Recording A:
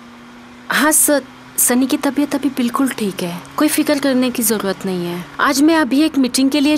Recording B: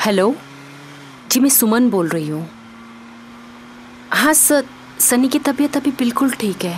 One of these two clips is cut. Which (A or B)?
A